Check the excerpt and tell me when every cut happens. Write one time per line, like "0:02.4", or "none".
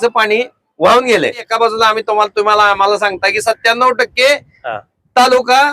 0:01.4